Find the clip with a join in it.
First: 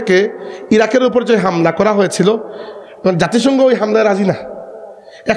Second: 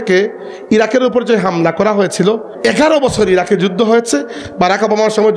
second; 1 cut; at 2.5 s

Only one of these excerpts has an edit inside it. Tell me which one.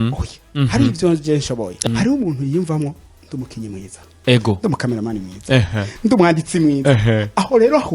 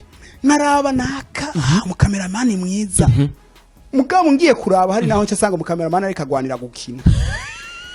first; 1 cut; at 1.8 s

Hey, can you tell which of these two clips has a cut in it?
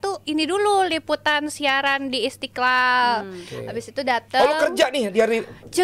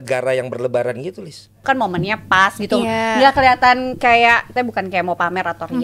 second; 2 cuts; at 1.6 s, 4.5 s

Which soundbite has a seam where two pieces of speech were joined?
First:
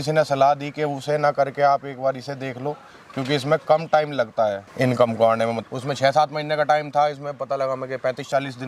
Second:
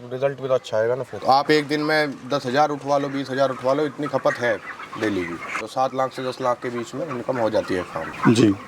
second; 2 cuts; at 1.1 s, 5.6 s

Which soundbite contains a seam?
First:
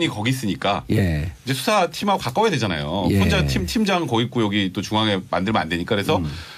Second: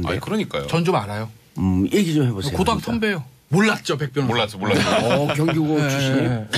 second; 1 cut; at 5.2 s

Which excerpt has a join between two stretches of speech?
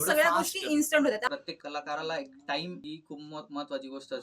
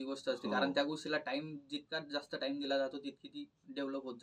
first; 2 cuts; at 1.3 s, 2.8 s

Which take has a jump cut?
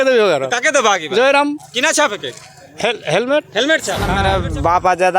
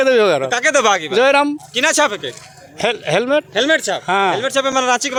first; 1 cut; at 4.1 s

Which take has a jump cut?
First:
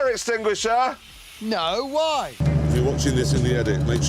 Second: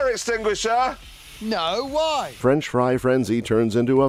first; 1 cut; at 2.3 s

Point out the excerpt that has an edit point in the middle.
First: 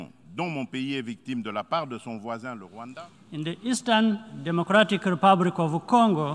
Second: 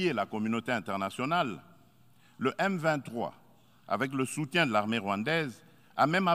first; 1 cut; at 2.7 s

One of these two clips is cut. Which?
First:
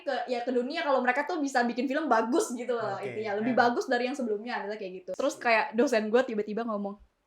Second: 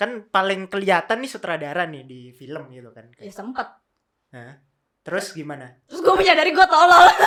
first; 1 cut; at 5.0 s

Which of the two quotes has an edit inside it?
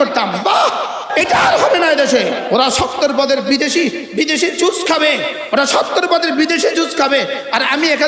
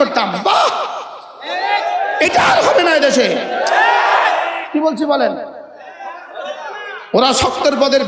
first; 2 cuts; at 1.1 s, 2.4 s

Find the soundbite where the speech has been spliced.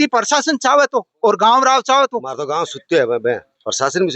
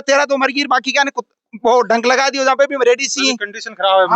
first; 1 cut; at 2.4 s

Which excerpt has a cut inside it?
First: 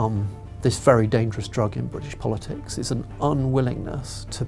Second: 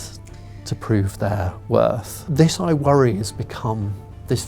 second; 1 cut; at 2.2 s

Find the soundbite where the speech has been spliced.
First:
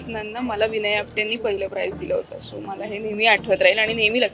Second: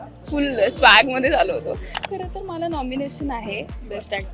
second; 1 cut; at 2.1 s

